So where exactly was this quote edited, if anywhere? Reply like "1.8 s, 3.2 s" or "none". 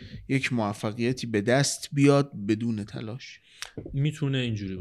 none